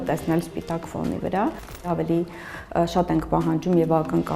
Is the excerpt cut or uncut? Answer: cut